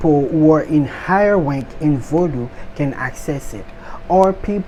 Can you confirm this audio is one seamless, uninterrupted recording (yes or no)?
yes